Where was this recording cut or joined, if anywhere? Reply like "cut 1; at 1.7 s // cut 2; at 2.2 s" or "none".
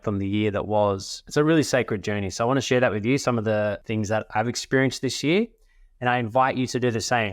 cut 1; at 1.1 s // cut 2; at 2.6 s